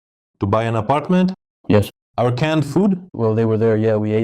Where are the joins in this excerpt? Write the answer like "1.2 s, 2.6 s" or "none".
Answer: 2.0 s